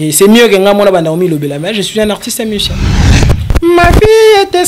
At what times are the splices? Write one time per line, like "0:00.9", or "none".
0:03.1